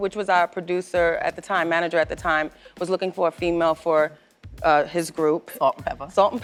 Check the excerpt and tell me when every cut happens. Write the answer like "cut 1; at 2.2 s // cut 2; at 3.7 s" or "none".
none